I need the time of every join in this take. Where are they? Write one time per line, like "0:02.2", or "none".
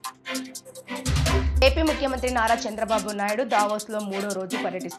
0:01.1